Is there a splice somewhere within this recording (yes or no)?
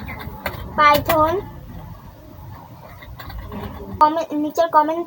yes